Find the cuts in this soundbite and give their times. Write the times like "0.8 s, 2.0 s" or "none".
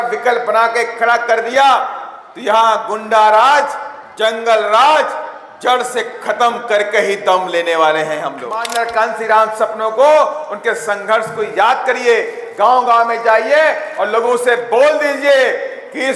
8.6 s